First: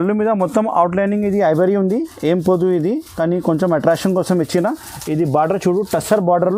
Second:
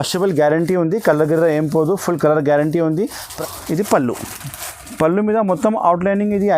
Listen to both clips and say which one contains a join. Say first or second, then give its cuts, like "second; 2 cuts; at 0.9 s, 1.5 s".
second; 1 cut; at 3.2 s